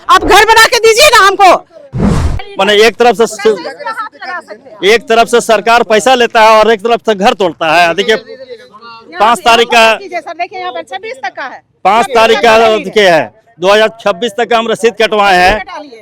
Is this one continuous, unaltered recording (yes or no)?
no